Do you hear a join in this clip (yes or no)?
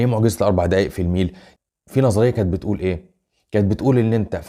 yes